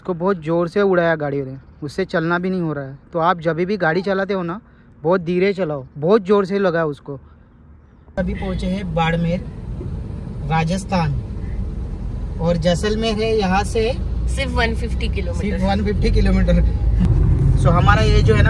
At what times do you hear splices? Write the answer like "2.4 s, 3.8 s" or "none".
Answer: none